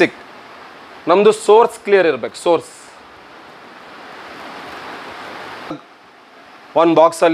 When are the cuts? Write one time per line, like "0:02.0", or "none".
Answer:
0:05.7